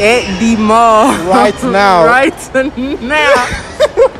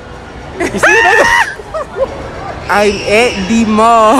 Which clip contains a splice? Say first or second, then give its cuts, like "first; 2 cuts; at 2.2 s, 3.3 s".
second; 1 cut; at 2.1 s